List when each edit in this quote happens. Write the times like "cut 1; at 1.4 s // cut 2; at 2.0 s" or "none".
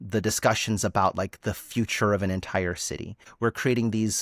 cut 1; at 3.2 s